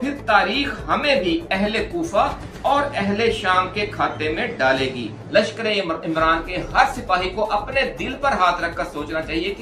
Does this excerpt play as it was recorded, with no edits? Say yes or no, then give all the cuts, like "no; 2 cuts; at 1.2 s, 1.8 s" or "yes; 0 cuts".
no; 1 cut; at 5.2 s